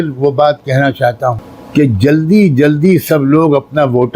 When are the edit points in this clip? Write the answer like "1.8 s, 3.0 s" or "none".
1.5 s